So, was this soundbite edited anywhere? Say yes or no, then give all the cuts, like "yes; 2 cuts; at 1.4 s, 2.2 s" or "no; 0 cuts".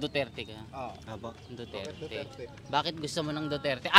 no; 0 cuts